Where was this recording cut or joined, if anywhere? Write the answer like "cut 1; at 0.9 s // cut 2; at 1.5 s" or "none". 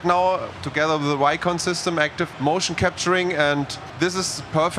cut 1; at 2.2 s // cut 2; at 3.8 s